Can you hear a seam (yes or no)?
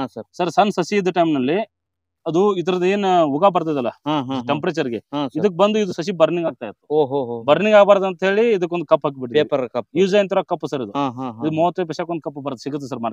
no